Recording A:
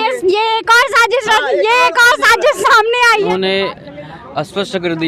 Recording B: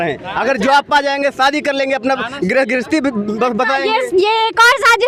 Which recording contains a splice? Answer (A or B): A